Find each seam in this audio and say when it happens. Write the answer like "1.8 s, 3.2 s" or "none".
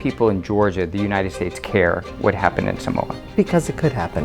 3.2 s